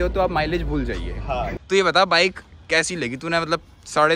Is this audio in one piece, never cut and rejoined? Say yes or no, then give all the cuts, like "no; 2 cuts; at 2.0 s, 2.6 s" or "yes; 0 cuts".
no; 1 cut; at 1.5 s